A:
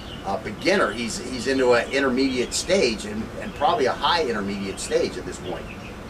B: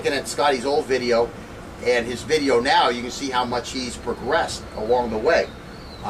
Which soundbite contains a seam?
A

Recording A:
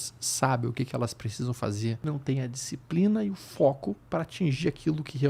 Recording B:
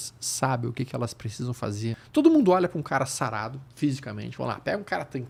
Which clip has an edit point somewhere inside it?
A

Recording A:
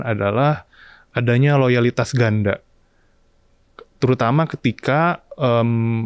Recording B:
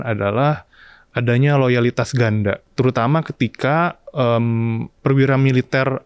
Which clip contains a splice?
B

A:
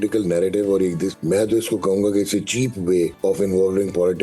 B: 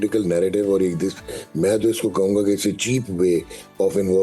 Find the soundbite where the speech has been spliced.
A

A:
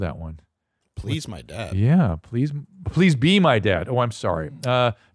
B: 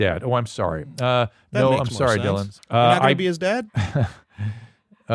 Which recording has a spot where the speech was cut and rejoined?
B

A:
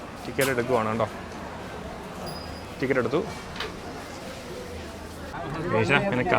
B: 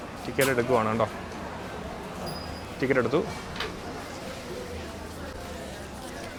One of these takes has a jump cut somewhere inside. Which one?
A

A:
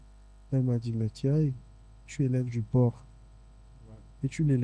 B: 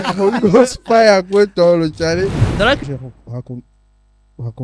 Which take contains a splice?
B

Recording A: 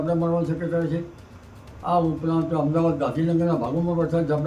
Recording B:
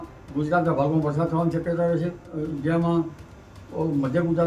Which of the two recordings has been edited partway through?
B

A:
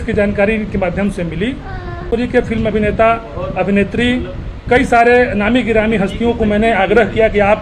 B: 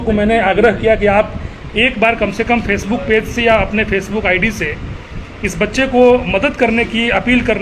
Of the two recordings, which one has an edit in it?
A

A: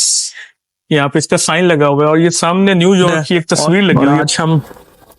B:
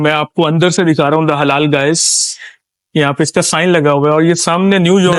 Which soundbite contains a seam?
A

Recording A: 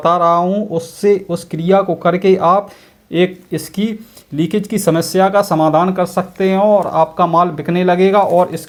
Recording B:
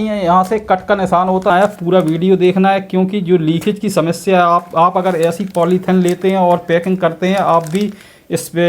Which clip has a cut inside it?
B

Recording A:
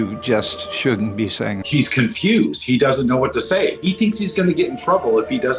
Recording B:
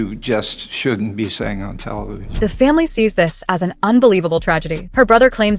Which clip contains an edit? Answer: A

